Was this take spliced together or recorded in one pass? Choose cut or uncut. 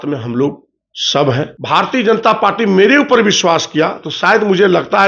cut